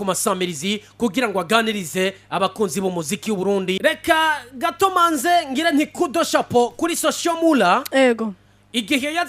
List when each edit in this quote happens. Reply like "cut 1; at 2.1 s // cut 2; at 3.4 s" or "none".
cut 1; at 3.8 s